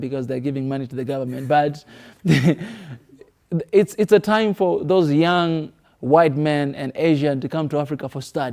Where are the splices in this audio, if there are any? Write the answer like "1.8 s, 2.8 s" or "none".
none